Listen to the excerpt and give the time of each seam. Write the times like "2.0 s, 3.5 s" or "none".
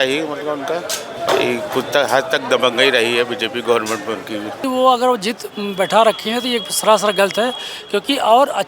1.1 s, 4.6 s